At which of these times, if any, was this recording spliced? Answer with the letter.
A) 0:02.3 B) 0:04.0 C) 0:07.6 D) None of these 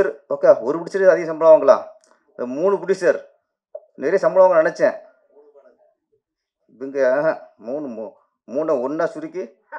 D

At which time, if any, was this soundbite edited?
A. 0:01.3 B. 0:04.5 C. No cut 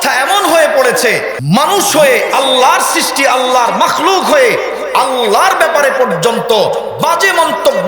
A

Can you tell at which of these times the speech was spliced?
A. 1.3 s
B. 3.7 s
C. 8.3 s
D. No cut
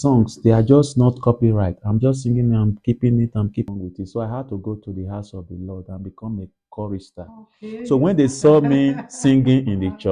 B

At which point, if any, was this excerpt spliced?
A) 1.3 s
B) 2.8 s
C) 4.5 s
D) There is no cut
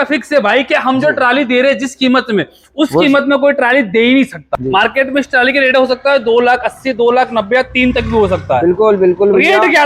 C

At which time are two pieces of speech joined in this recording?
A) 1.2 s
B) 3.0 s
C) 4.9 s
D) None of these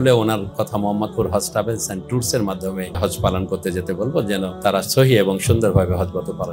B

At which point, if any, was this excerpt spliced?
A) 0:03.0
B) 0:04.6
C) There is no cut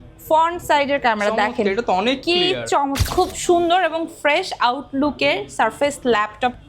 A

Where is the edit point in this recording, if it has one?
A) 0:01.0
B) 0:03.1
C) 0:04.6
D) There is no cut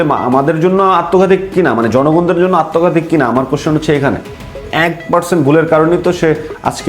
C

